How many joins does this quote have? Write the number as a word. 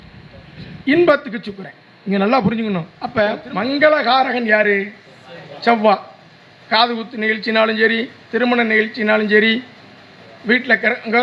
one